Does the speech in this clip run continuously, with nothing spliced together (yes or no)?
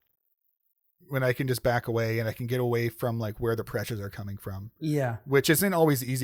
yes